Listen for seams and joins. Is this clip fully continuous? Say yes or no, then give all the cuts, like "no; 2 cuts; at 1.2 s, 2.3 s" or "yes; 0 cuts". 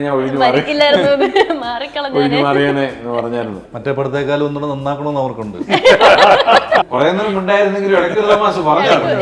no; 2 cuts; at 3.7 s, 6.9 s